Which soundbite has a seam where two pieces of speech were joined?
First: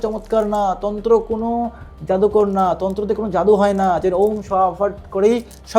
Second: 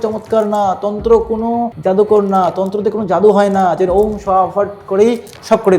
second; 1 cut; at 1.7 s

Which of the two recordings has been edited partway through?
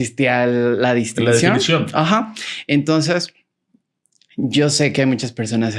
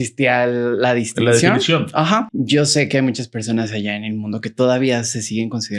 second; 1 cut; at 2.3 s

